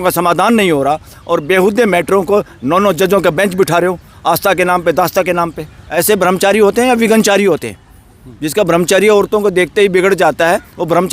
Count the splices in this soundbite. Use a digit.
1